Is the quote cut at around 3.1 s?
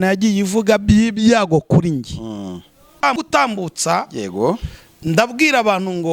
yes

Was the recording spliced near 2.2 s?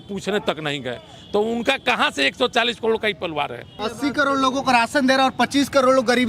no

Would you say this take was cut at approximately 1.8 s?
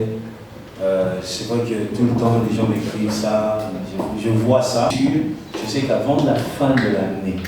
no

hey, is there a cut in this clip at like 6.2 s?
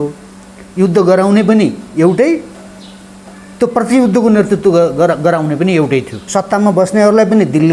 yes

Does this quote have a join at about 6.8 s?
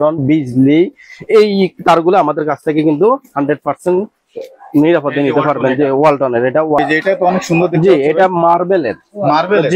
yes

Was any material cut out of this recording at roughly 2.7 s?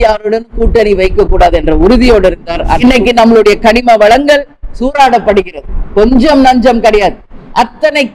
yes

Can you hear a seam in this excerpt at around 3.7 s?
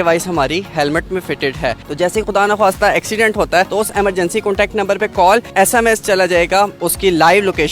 yes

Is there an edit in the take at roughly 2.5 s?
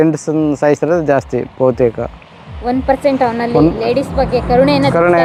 no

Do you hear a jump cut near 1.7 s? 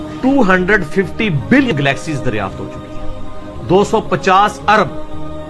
yes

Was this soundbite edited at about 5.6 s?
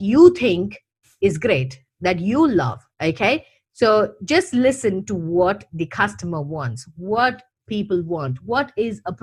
no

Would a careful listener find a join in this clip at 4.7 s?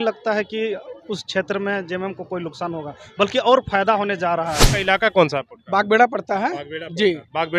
yes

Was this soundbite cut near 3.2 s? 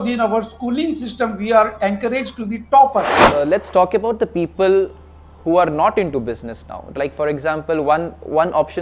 yes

